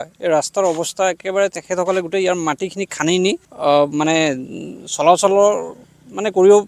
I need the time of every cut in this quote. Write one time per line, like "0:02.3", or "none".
0:03.5